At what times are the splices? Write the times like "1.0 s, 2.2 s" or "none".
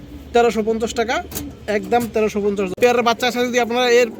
2.8 s